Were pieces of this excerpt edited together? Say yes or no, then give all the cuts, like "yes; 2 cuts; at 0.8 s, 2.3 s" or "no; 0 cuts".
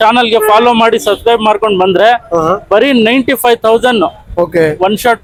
no; 0 cuts